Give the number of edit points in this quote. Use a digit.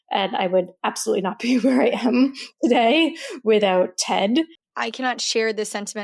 1